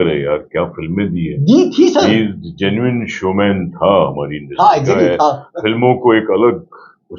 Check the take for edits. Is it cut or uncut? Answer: uncut